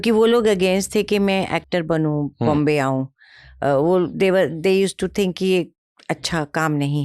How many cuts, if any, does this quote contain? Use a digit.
0